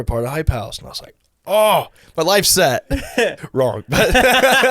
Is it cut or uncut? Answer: cut